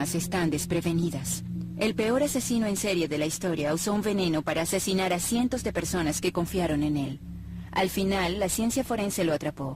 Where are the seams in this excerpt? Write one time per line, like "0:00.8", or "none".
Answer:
0:04.2